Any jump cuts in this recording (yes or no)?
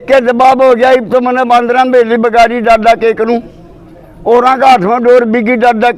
no